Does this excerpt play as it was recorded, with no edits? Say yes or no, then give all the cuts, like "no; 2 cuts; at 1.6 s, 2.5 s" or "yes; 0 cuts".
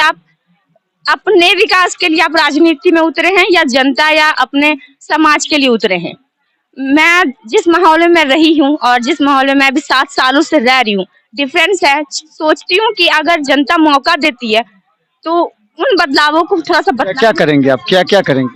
yes; 0 cuts